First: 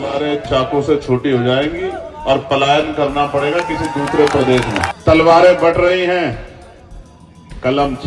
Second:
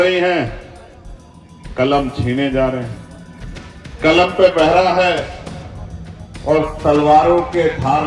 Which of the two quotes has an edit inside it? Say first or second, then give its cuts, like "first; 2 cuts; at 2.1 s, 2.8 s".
first; 1 cut; at 4.9 s